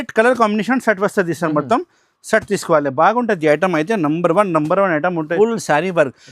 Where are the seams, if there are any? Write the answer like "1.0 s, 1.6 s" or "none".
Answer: 5.3 s